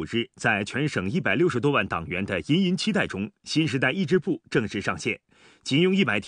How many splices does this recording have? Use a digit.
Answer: 1